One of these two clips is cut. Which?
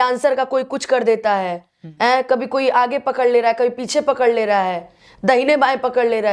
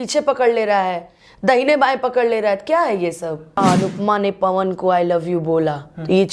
second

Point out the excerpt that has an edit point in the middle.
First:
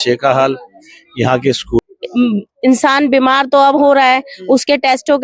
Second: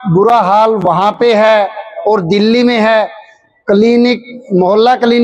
first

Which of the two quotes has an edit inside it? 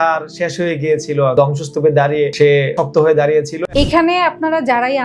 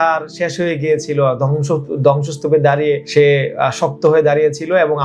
first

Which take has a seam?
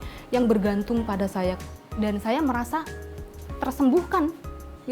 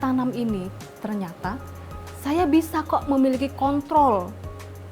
first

